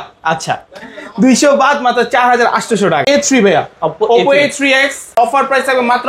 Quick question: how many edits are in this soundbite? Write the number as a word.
two